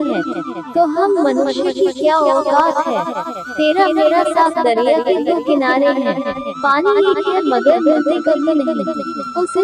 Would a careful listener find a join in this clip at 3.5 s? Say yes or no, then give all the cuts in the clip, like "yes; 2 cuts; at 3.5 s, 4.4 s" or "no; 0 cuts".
yes; 1 cut; at 3.5 s